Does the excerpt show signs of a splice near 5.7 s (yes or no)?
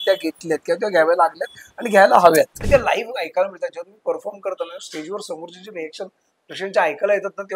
no